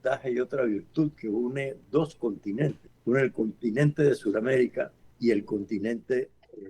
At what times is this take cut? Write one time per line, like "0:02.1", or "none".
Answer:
0:02.9
0:05.0